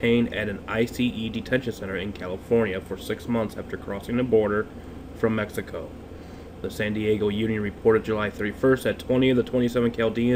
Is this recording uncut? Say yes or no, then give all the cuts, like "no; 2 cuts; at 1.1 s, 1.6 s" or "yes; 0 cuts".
yes; 0 cuts